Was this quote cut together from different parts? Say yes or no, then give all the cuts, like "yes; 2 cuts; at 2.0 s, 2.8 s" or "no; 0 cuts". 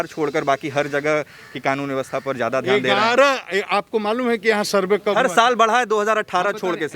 no; 0 cuts